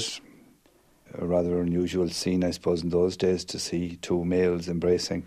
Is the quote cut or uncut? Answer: uncut